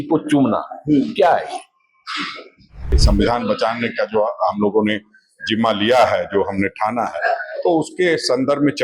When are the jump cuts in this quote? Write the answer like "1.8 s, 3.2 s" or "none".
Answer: 3.0 s